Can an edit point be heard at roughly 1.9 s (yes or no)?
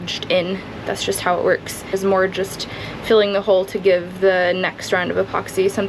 yes